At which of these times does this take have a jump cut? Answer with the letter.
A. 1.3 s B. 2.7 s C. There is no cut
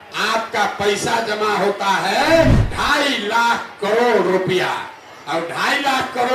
B